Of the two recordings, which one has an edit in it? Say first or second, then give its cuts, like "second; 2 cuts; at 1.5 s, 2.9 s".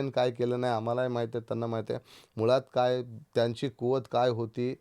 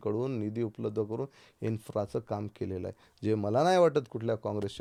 first; 1 cut; at 3.2 s